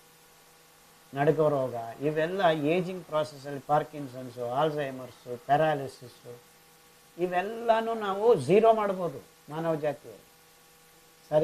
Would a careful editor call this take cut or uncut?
uncut